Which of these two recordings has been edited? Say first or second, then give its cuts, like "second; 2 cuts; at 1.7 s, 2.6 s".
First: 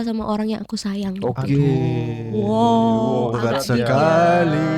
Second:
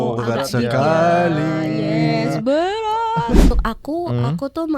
second; 1 cut; at 3.5 s